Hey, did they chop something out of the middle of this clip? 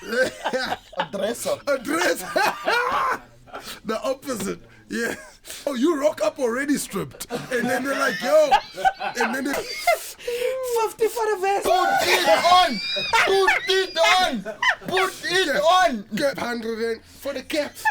yes; 3 cuts; at 5.7 s, 9.6 s, 16.4 s

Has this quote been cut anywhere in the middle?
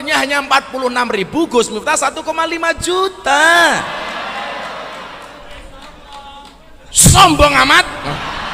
no; 0 cuts

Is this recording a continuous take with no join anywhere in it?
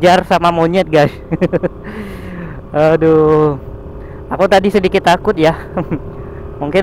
yes; 0 cuts

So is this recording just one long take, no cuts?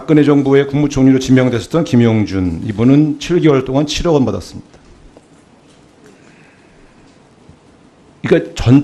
no; 1 cut; at 1.1 s

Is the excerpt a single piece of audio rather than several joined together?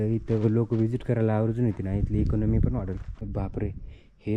no; 1 cut; at 3.3 s

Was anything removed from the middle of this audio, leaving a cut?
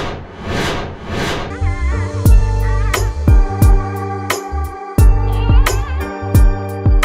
yes; 1 cut; at 1.5 s

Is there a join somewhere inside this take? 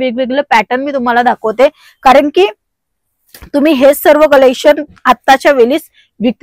no; 0 cuts

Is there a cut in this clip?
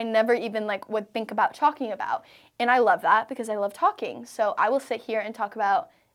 no; 0 cuts

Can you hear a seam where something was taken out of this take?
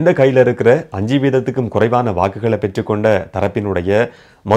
no; 0 cuts

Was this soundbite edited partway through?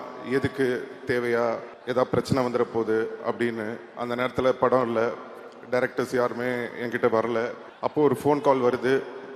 yes; 2 cuts; at 1.7 s, 7.6 s

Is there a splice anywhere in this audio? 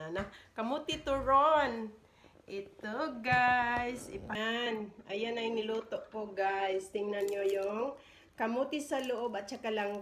yes; 1 cut; at 4.3 s

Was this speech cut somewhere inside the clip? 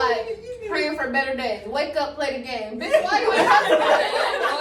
no; 0 cuts

